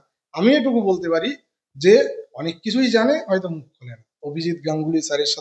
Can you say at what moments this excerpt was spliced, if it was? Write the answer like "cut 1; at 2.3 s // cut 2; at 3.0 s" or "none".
cut 1; at 4.1 s